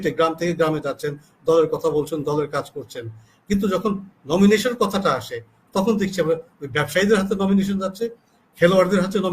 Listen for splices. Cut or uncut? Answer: uncut